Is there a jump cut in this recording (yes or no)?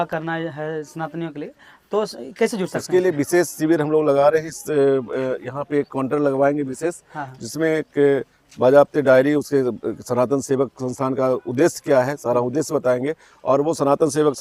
no